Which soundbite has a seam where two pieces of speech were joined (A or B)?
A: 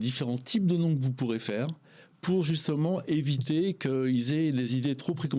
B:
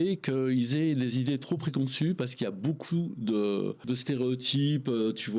B